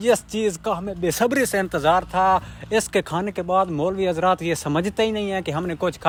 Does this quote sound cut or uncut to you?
uncut